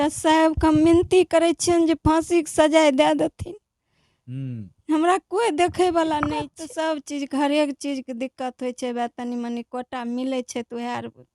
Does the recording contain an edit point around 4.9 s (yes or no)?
no